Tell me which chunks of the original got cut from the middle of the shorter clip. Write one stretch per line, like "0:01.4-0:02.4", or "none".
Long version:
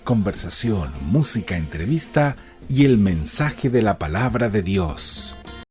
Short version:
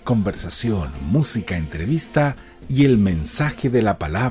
none